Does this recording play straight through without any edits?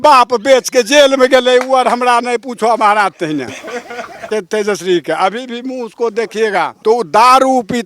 no; 2 cuts; at 4.2 s, 6.7 s

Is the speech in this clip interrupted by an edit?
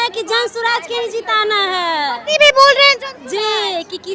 no; 0 cuts

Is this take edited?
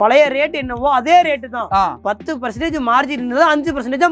no; 0 cuts

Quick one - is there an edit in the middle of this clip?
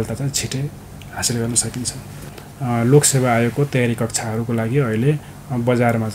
yes; 1 cut; at 2.1 s

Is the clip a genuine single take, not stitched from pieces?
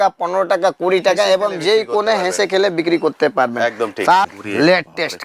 no; 1 cut; at 4.4 s

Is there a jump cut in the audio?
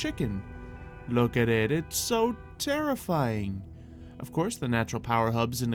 no; 0 cuts

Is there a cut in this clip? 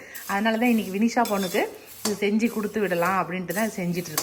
no; 0 cuts

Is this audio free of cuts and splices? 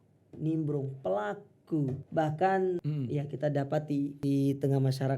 no; 3 cuts; at 2.0 s, 2.9 s, 4.2 s

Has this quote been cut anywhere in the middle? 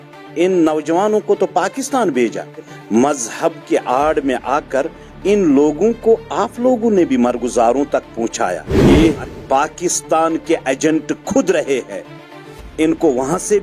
yes; 2 cuts; at 2.8 s, 8.7 s

